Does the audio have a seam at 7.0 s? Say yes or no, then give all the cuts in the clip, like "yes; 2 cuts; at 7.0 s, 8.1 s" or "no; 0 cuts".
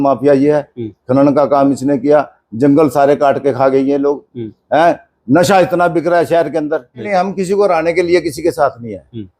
yes; 1 cut; at 7.0 s